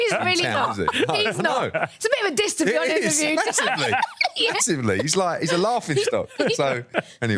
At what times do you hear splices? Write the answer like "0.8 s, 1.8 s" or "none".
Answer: none